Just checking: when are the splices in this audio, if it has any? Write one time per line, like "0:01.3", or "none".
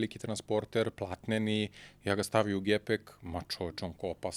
none